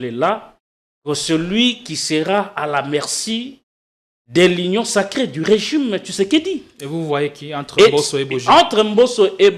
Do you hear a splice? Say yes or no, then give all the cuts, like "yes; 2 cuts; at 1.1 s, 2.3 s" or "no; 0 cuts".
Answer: no; 0 cuts